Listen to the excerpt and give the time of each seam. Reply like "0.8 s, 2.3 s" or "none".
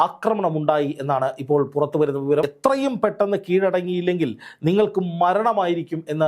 2.4 s